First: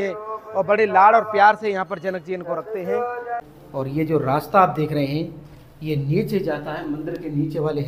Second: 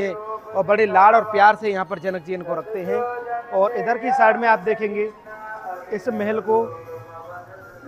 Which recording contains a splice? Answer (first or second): first